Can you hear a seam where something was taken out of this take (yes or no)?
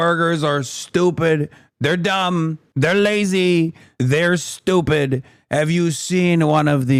no